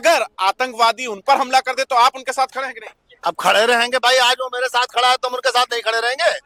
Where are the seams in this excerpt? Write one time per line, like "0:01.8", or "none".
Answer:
none